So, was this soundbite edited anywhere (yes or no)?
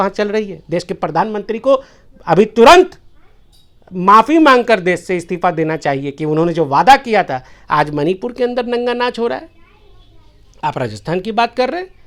no